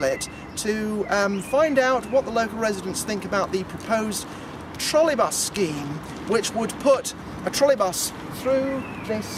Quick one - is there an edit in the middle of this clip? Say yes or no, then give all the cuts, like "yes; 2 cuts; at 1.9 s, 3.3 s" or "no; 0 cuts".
no; 0 cuts